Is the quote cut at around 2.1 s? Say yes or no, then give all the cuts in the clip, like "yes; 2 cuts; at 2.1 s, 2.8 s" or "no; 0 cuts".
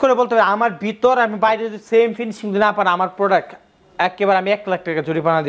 no; 0 cuts